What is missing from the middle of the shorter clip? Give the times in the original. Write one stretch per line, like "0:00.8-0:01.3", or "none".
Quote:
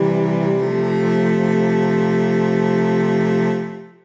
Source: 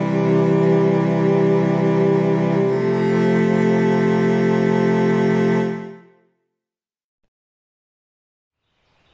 none